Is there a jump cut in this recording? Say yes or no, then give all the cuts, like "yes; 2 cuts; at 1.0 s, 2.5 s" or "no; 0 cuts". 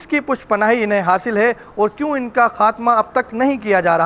no; 0 cuts